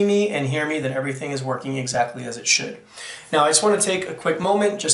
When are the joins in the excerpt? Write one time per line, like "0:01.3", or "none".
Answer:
0:01.0